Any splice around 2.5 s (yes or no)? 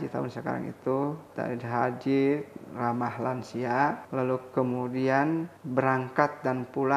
no